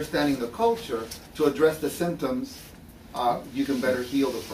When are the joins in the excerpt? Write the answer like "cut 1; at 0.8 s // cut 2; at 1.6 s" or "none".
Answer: cut 1; at 3.5 s